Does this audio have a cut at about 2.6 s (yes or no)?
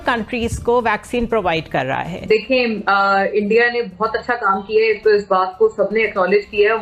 yes